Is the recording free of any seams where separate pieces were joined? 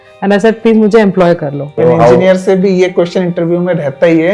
no; 1 cut; at 1.7 s

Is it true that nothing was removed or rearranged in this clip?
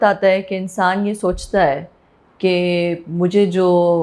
yes; 0 cuts

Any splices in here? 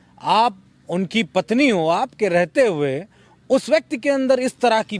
no; 0 cuts

